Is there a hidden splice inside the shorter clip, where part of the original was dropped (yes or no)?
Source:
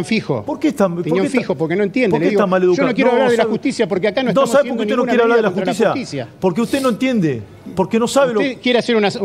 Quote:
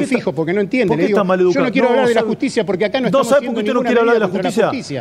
no